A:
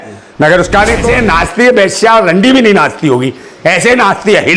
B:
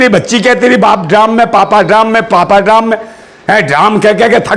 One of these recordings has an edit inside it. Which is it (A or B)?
A